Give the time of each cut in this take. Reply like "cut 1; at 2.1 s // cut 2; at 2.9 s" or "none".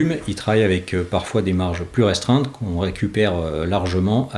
none